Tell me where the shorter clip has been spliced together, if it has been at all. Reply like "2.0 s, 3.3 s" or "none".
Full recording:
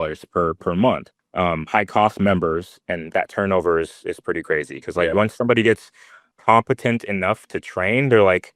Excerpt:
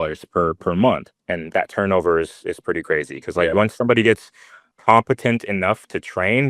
1.2 s